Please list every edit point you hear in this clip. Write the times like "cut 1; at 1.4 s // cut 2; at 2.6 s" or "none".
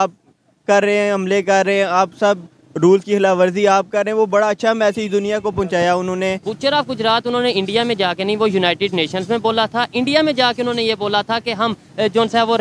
cut 1; at 6.5 s